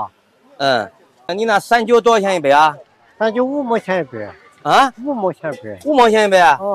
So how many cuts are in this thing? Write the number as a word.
one